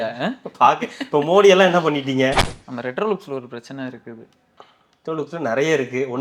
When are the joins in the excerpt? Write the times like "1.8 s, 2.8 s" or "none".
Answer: 2.4 s